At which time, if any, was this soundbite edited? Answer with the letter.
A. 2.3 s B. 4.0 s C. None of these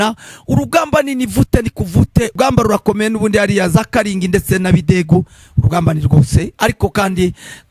A